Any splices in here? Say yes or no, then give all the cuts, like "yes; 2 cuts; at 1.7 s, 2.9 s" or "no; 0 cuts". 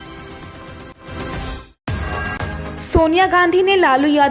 yes; 2 cuts; at 1.0 s, 2.6 s